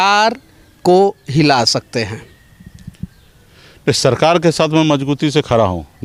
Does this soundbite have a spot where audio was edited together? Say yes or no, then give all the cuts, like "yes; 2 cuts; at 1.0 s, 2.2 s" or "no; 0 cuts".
no; 0 cuts